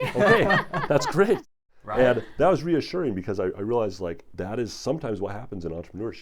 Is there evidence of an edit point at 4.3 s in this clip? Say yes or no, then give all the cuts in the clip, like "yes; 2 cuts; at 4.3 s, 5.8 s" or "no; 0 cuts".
yes; 1 cut; at 4.3 s